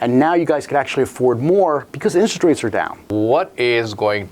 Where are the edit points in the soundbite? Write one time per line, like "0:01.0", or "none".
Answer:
0:03.0